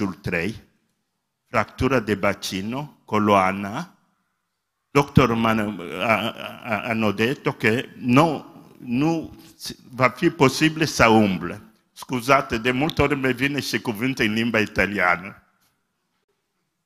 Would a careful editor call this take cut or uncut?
cut